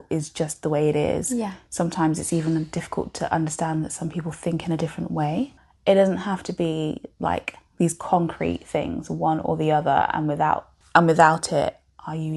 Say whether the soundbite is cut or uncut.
cut